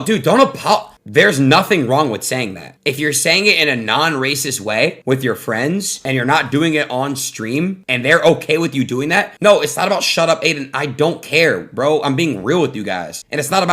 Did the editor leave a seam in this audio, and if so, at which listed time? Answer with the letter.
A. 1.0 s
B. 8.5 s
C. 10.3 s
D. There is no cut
A